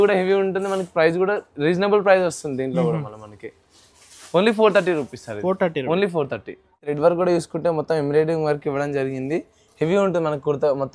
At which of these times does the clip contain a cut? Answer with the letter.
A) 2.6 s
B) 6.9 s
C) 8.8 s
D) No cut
B